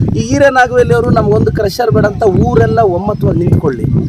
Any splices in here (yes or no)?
no